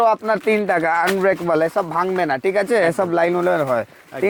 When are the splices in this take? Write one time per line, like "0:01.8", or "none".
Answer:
none